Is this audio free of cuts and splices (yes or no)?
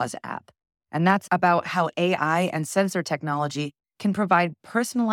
yes